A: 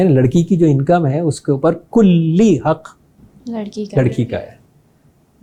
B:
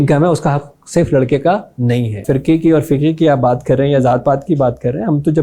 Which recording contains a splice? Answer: B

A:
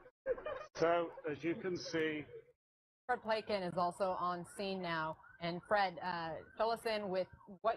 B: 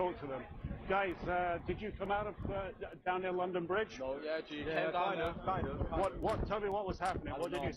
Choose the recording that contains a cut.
B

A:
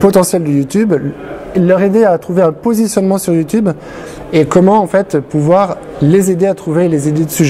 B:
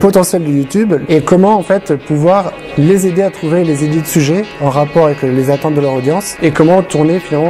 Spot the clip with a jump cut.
B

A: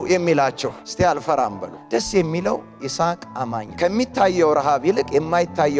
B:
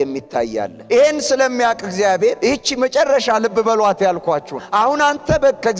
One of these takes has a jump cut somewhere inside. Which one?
A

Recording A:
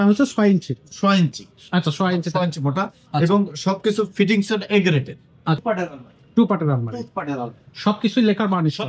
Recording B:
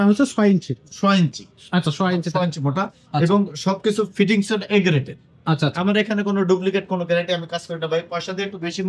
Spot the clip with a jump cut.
A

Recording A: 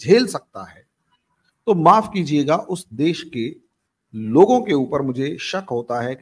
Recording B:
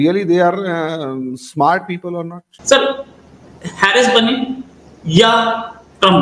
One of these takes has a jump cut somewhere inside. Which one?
B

